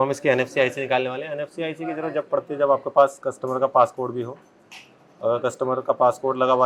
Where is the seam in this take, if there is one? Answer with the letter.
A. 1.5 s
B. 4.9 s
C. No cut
C